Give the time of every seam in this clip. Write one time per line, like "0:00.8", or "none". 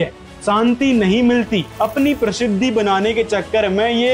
0:01.7